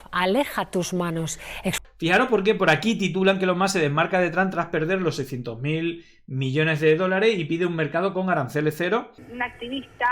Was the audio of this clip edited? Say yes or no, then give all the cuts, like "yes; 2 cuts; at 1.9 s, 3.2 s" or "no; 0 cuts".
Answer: yes; 2 cuts; at 1.9 s, 9.1 s